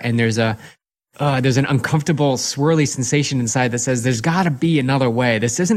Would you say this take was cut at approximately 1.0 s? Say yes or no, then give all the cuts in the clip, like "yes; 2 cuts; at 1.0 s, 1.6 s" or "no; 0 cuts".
yes; 1 cut; at 1.0 s